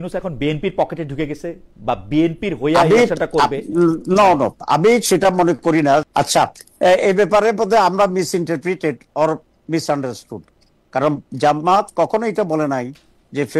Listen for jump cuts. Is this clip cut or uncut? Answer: uncut